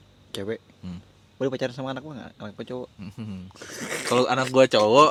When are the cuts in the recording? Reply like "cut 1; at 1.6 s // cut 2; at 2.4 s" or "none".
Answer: none